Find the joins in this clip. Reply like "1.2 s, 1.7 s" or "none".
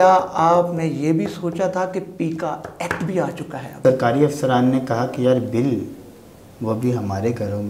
3.8 s